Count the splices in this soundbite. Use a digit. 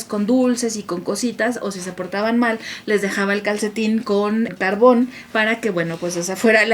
1